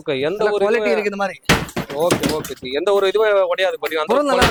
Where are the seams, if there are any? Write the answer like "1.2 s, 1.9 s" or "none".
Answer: none